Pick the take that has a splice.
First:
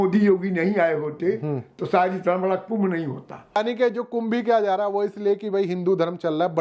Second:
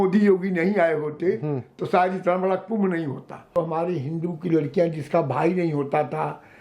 second; 1 cut; at 3.4 s

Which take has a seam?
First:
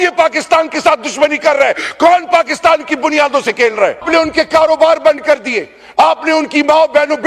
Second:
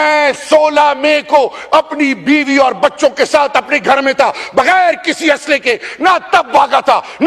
first; 1 cut; at 4.0 s

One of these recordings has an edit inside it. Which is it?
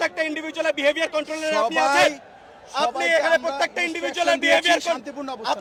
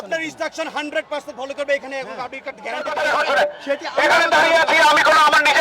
second; 1 cut; at 2.9 s

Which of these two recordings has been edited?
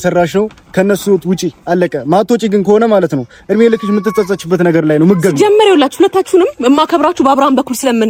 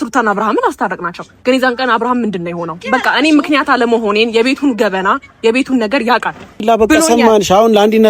second; 1 cut; at 6.6 s

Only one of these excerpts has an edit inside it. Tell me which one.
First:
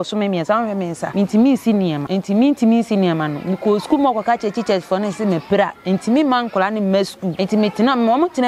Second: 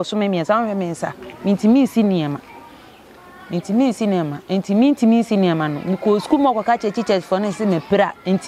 first; 3 cuts; at 1.0 s, 2.0 s, 7.2 s

